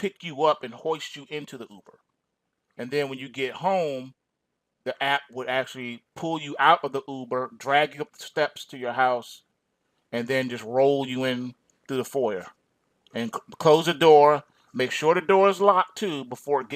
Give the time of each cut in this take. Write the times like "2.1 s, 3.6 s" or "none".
8.3 s